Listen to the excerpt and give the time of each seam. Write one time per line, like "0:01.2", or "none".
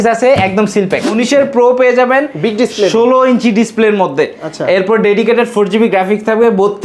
0:01.1